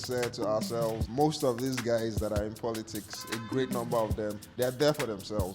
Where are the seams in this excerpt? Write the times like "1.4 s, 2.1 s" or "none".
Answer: 1.0 s, 4.5 s